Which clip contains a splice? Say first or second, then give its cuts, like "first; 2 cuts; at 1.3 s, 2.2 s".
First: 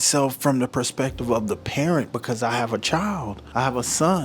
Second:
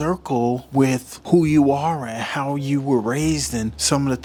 first; 1 cut; at 3.4 s